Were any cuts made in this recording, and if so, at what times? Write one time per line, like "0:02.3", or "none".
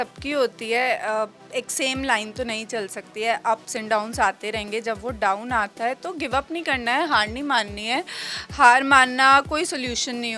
none